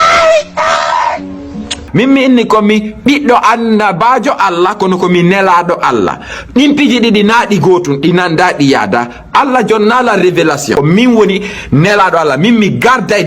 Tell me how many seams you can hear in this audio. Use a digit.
2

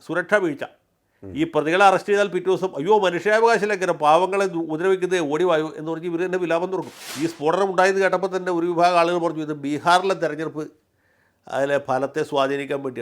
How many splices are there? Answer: 1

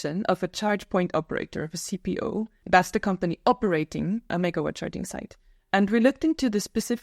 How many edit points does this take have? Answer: 2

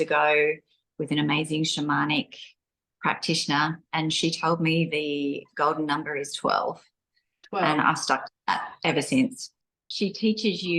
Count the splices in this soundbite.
1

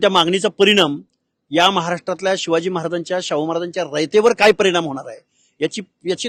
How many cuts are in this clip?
0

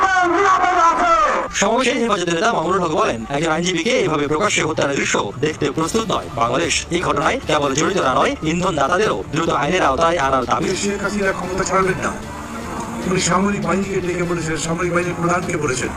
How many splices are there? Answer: 1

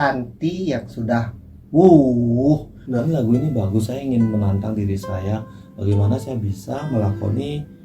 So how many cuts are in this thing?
1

